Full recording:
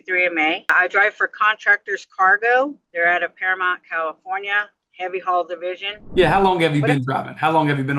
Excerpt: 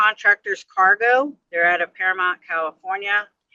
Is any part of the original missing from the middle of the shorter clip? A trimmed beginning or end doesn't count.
no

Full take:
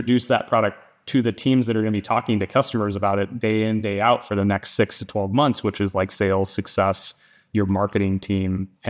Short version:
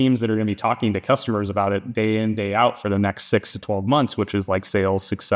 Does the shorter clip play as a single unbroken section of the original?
yes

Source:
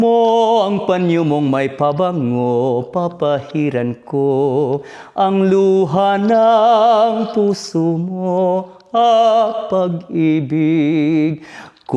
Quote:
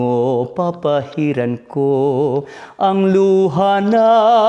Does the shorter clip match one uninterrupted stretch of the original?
yes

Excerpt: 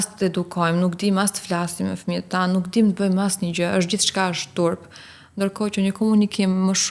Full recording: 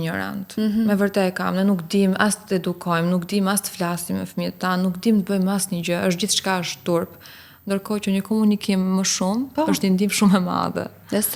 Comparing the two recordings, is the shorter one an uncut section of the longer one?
yes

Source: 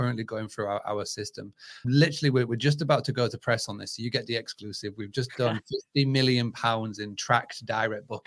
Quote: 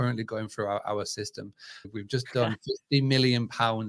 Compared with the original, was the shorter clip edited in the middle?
yes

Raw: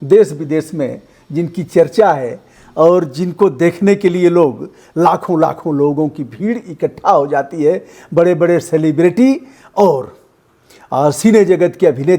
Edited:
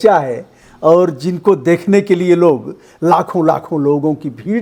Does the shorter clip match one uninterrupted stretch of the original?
yes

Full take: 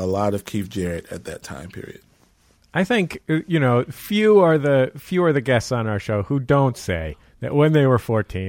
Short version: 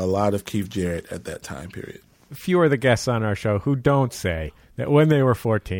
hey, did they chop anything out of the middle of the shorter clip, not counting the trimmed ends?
yes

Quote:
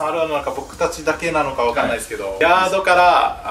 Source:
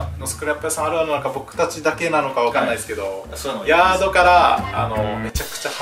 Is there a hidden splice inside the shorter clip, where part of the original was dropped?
yes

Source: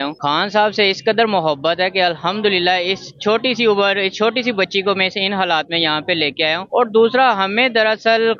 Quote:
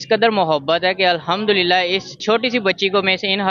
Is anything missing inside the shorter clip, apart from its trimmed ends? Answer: yes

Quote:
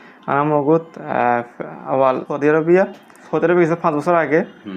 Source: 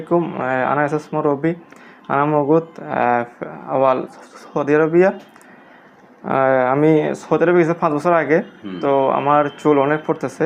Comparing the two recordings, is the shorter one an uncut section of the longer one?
no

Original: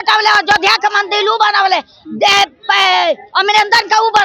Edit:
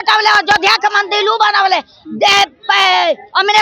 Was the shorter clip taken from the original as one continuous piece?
yes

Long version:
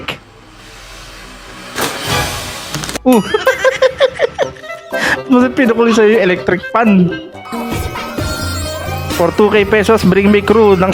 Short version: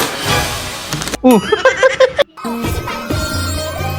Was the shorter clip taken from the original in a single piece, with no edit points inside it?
no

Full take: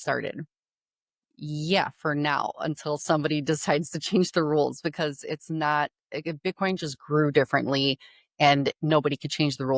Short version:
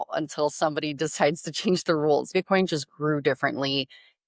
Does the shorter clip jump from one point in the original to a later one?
yes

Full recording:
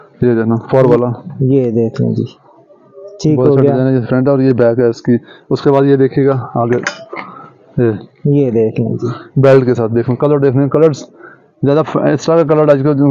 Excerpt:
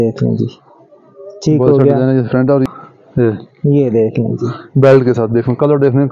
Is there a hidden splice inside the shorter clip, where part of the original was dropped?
yes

